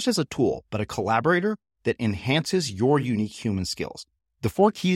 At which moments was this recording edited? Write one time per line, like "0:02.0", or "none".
none